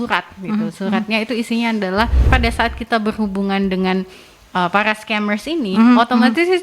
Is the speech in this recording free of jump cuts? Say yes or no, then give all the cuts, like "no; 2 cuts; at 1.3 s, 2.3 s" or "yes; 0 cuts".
no; 1 cut; at 2.2 s